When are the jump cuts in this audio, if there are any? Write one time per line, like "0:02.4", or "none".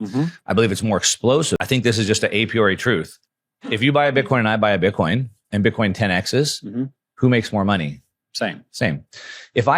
0:01.6